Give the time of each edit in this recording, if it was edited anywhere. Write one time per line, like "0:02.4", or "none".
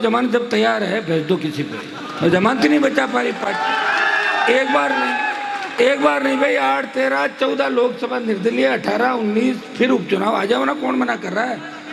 none